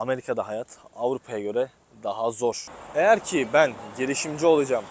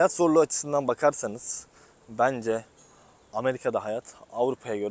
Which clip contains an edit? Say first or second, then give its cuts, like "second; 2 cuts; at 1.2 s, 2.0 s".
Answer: first; 1 cut; at 2.7 s